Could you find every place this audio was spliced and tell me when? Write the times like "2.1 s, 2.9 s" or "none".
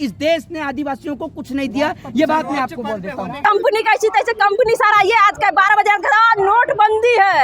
3.4 s